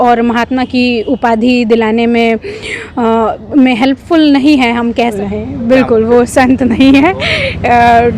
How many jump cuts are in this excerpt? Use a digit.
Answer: 1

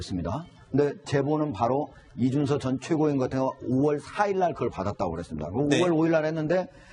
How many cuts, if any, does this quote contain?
1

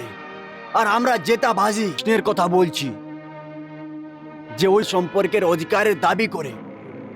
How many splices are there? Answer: 2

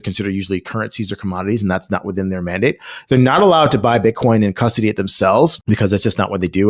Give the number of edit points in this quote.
1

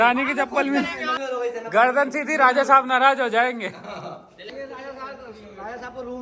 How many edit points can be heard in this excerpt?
2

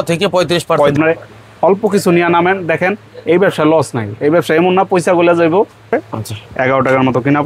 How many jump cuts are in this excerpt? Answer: 2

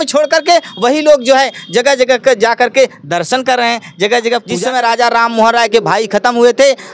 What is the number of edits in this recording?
1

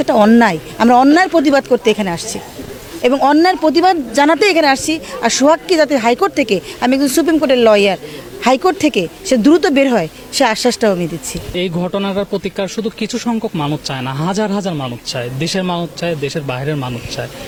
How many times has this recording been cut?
0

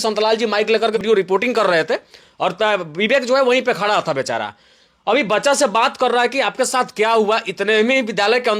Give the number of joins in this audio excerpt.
1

